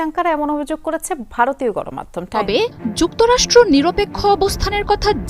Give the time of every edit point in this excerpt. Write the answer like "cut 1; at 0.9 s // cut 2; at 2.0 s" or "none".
cut 1; at 2.4 s